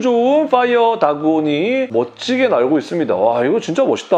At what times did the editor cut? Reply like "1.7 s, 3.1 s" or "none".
none

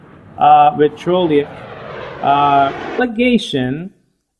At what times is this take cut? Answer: none

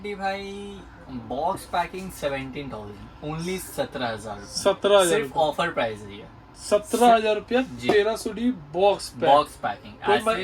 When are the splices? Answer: none

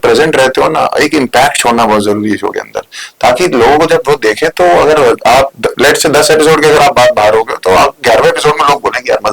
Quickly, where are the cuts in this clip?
none

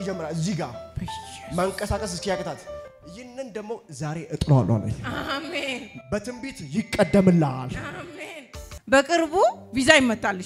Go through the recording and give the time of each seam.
8.7 s

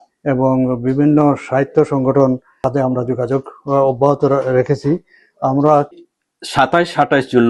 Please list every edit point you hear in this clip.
6.0 s

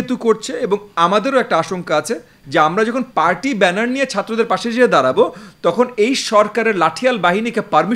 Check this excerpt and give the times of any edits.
2.3 s

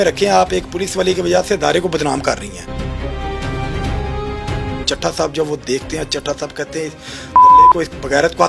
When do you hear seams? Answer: 4.8 s

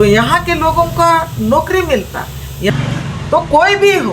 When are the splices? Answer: 2.7 s

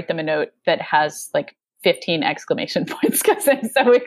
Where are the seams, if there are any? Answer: none

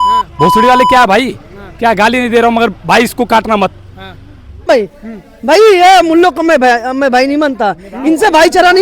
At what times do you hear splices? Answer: 4.6 s

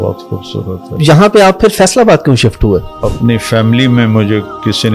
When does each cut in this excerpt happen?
1.0 s, 3.0 s

